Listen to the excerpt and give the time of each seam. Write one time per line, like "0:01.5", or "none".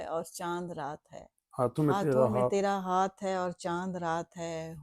none